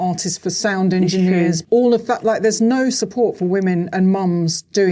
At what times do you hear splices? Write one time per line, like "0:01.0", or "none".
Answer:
0:01.6